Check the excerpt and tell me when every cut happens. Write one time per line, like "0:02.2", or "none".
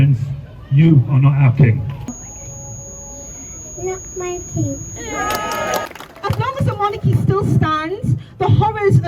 0:02.0
0:05.9